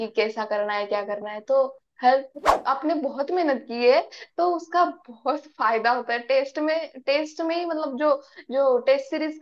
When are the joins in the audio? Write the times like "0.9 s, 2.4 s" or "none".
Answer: 2.5 s